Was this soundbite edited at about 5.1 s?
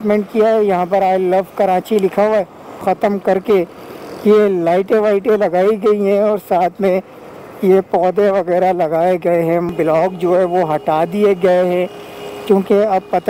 no; 2 cuts; at 2.8 s, 9.7 s

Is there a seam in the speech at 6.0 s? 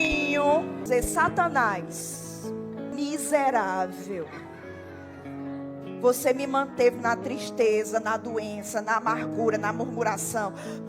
no; 2 cuts; at 0.8 s, 2.9 s

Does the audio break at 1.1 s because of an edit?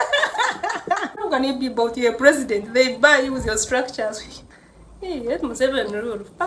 yes; 1 cut; at 1.1 s

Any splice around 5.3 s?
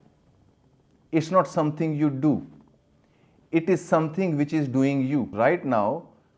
yes; 1 cut; at 5.3 s

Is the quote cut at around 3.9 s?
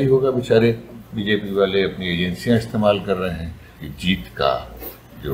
yes; 1 cut; at 3.9 s

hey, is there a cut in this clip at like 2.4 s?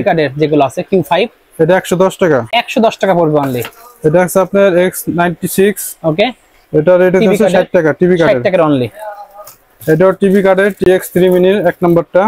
no; 0 cuts

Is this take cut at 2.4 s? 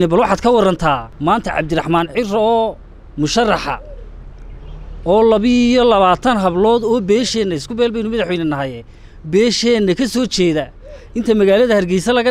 no; 1 cut; at 1.1 s

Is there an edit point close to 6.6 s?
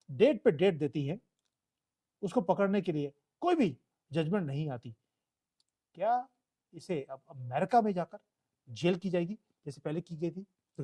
no; 0 cuts

